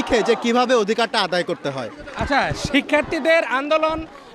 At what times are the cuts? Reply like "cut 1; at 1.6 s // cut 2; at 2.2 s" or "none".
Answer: none

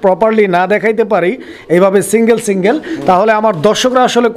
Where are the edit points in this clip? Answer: none

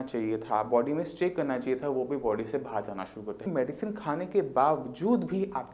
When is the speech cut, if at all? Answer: cut 1; at 3.4 s

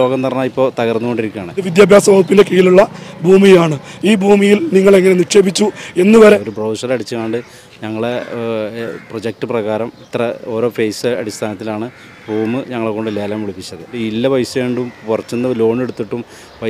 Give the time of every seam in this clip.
cut 1; at 1.6 s // cut 2; at 6.5 s // cut 3; at 13.9 s

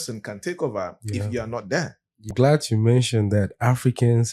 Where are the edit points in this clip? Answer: cut 1; at 2.3 s

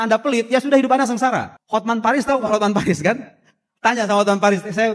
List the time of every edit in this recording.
cut 1; at 1.6 s

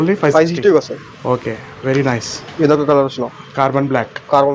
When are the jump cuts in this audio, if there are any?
none

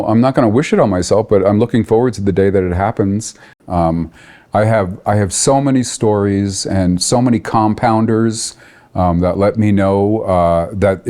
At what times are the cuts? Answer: cut 1; at 3.6 s

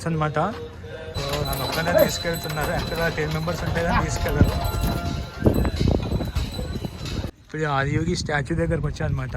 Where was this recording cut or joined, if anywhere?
cut 1; at 1.1 s // cut 2; at 7.4 s

